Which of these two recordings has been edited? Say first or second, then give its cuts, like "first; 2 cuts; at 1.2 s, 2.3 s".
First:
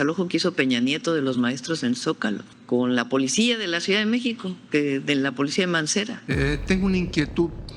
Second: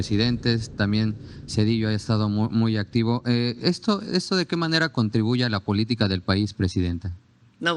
first; 2 cuts; at 2.5 s, 6.2 s